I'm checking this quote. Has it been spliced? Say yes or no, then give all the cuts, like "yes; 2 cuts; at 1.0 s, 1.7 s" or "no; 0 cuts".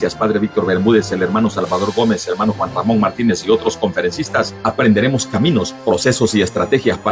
yes; 2 cuts; at 2.4 s, 6.0 s